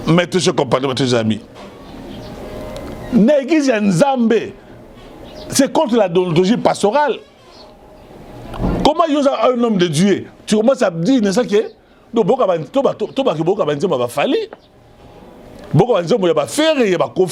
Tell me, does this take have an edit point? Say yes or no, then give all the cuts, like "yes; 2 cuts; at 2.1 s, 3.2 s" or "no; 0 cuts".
no; 0 cuts